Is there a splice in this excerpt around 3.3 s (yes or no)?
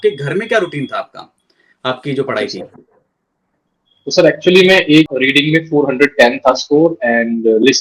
no